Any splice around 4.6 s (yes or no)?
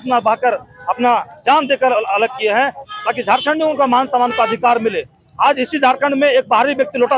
no